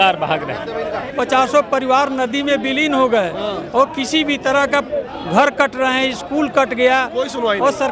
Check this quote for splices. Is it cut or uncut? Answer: cut